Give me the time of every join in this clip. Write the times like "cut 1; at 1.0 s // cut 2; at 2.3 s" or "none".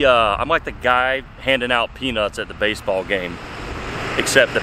none